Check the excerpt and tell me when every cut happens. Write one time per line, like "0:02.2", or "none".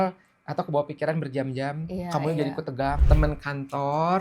0:03.0